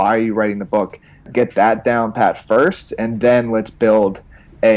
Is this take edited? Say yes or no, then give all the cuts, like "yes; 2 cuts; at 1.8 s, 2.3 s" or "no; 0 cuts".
yes; 1 cut; at 1.3 s